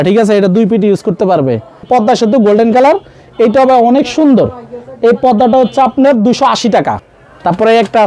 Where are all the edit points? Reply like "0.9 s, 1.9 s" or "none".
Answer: 1.8 s, 7.1 s